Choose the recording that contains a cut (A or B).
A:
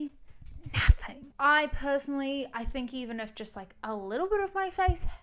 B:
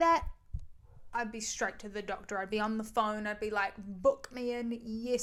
A